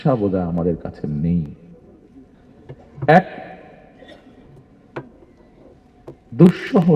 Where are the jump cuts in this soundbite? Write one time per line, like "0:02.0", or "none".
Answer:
none